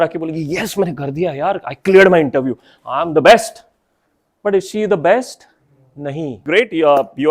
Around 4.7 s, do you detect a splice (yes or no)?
no